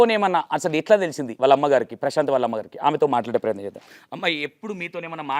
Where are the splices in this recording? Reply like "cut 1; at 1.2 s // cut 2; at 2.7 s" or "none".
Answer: cut 1; at 0.9 s